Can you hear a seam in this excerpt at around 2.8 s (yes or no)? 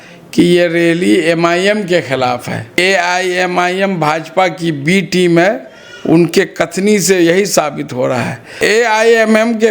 yes